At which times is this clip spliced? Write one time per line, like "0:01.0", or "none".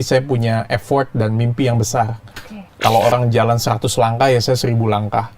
0:02.6

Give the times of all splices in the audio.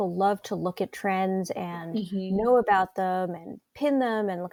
none

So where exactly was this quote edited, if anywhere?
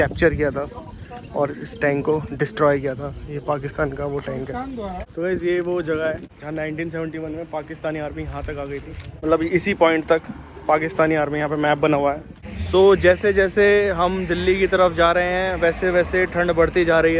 0:05.1
0:06.3
0:09.1
0:12.6

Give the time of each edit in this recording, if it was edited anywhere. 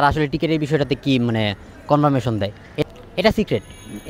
0:02.8

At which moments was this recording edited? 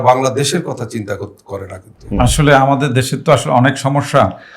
0:02.2

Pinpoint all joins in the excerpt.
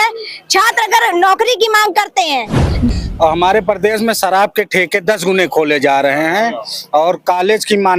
0:02.9

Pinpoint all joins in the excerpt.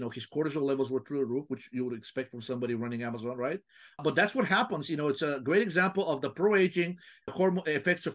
0:04.0
0:07.3

